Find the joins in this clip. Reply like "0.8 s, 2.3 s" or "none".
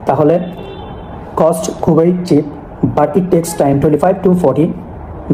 none